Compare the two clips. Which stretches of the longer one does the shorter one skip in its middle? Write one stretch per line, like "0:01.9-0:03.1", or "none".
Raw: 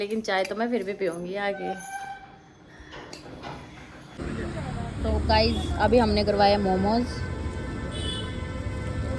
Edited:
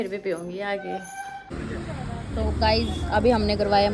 0:02.2-0:04.1